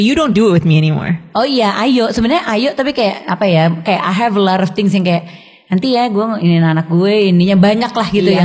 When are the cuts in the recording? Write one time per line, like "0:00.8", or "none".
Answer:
0:01.2